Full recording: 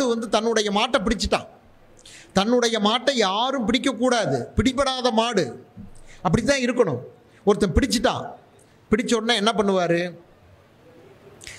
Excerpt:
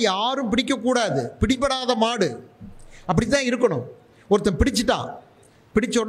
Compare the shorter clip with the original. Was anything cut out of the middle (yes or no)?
no